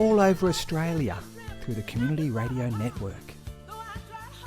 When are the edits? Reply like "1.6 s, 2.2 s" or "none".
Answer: 3.1 s